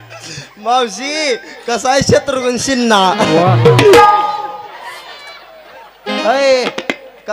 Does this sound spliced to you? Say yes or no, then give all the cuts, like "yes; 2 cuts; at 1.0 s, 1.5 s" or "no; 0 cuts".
yes; 1 cut; at 4.7 s